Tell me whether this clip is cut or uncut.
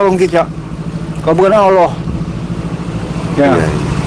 uncut